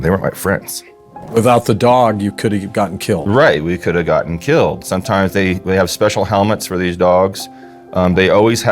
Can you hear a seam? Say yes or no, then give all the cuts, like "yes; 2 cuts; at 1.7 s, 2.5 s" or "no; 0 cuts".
yes; 2 cuts; at 1.2 s, 4.8 s